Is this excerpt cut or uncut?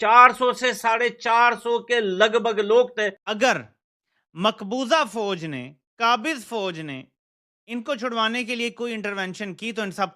cut